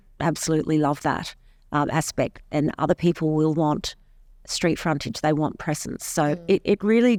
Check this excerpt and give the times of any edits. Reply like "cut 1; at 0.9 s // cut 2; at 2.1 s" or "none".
none